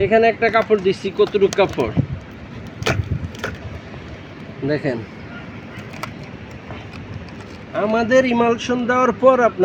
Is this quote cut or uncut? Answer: uncut